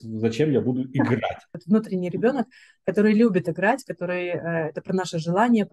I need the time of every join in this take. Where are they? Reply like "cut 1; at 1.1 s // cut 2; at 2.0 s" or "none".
cut 1; at 1.6 s